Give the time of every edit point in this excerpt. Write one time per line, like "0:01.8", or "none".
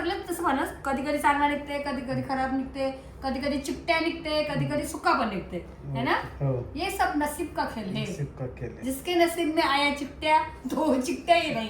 none